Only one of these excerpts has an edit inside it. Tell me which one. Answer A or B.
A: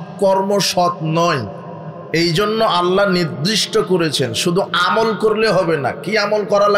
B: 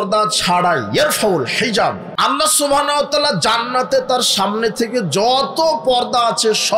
B